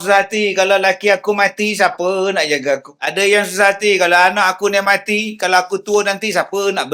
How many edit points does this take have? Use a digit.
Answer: 1